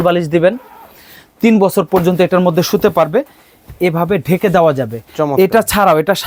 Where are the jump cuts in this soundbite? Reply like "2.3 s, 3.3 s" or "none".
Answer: none